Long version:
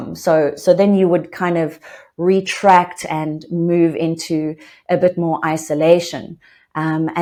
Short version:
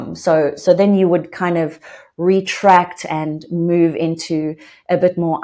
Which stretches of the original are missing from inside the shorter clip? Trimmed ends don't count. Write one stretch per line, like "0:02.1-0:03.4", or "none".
none